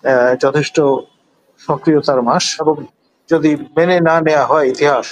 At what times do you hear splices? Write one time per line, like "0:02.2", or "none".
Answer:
0:02.5